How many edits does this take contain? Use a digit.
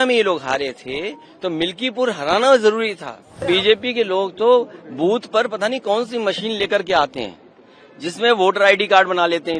1